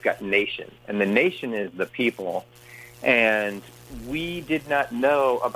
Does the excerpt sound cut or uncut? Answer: uncut